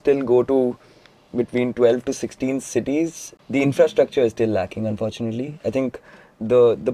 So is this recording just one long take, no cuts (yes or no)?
no